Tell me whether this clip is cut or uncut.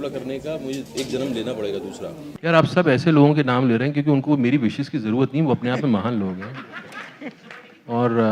cut